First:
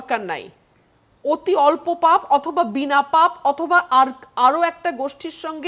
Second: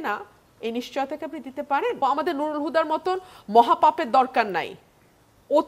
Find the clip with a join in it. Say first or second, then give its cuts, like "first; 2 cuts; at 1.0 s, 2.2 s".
second; 1 cut; at 2.0 s